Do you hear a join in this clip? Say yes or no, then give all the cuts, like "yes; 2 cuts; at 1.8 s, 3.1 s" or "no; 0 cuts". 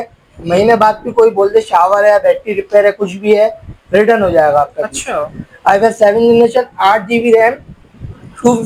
no; 0 cuts